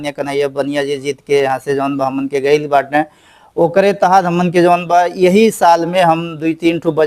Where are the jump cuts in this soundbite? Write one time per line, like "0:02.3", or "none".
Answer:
none